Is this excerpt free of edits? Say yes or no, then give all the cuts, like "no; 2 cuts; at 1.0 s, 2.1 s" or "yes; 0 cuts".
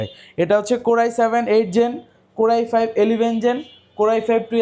yes; 0 cuts